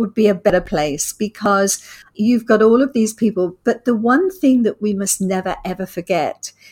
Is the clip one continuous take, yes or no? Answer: no